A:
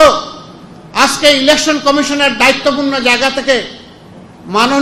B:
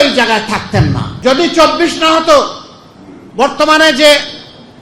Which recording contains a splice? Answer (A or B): B